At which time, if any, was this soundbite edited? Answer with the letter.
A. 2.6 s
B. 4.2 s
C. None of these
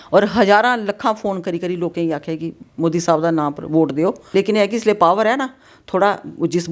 B